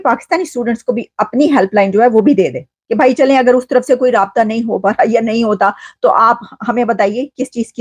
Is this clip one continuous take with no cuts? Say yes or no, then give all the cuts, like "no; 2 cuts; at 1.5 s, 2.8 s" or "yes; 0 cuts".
yes; 0 cuts